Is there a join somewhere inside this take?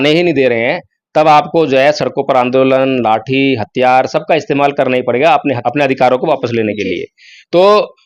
no; 0 cuts

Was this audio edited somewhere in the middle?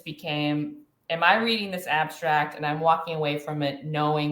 no; 0 cuts

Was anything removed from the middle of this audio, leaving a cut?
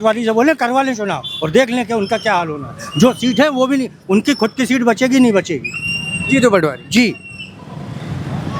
no; 0 cuts

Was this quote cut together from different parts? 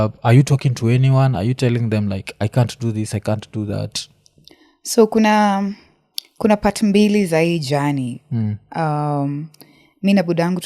no; 0 cuts

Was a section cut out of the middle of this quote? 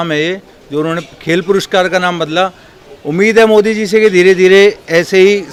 no; 0 cuts

